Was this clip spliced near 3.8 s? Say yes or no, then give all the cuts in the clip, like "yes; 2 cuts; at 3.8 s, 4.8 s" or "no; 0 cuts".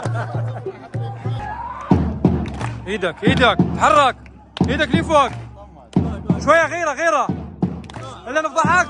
no; 1 cut; at 1.4 s